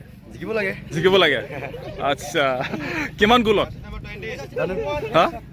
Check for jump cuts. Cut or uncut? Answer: uncut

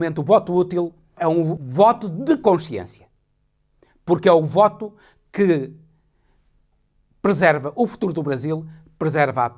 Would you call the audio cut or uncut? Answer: cut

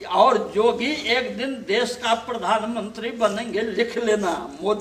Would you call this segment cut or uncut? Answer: uncut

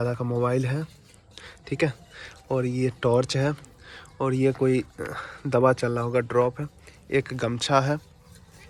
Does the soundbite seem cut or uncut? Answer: uncut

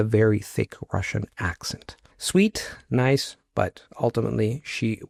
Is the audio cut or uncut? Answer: uncut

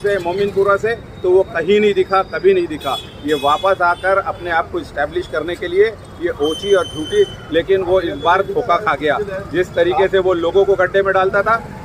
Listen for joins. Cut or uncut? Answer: uncut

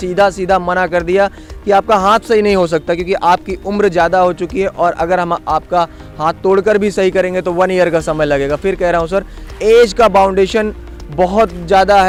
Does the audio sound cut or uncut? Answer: uncut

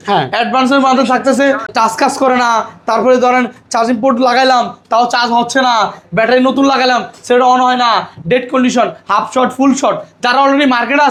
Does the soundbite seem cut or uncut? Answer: uncut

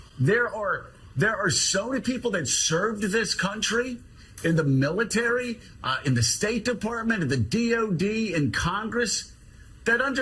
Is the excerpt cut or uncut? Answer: uncut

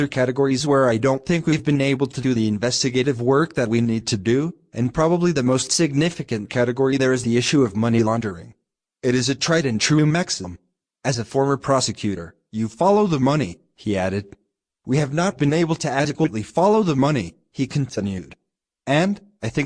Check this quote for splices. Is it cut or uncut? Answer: uncut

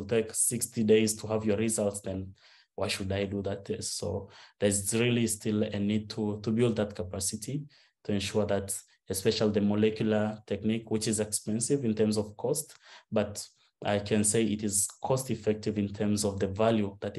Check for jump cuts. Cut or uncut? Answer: uncut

